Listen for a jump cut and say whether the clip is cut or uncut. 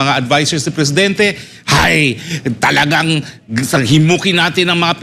uncut